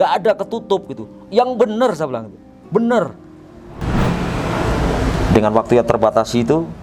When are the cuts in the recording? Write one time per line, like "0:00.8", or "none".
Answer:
0:03.8